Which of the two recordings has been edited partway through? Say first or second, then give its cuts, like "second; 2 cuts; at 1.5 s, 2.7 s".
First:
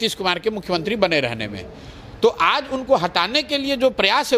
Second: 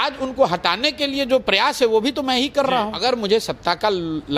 second; 1 cut; at 3.0 s